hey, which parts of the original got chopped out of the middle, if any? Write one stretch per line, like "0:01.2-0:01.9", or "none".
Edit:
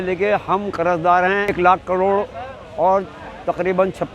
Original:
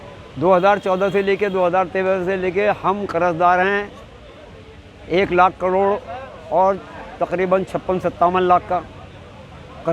0:03.8-0:05.2